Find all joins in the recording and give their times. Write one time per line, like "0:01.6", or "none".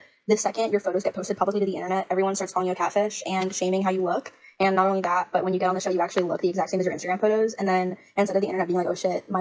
none